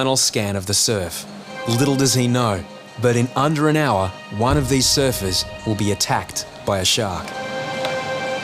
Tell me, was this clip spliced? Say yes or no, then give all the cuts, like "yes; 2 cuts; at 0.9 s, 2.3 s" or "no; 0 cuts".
yes; 4 cuts; at 1.5 s, 4.2 s, 5.5 s, 7.4 s